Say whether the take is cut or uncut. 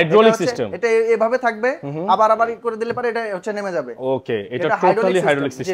uncut